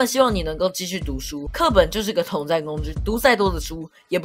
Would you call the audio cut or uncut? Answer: cut